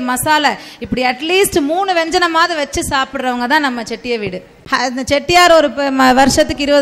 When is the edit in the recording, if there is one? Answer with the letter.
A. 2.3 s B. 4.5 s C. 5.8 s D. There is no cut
B